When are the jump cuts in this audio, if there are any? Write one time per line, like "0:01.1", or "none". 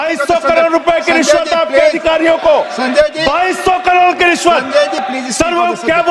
none